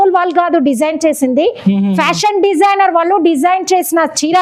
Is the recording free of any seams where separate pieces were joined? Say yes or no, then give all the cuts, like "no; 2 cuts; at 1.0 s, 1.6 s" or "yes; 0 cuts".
yes; 0 cuts